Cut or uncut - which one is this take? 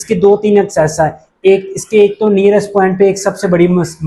uncut